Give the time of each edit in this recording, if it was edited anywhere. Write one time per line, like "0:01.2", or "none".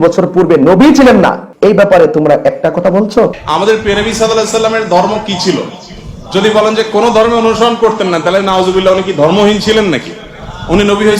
0:01.4
0:03.4